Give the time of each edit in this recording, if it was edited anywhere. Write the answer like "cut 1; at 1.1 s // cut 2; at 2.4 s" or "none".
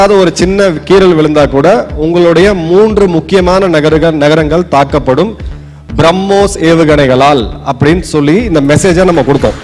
none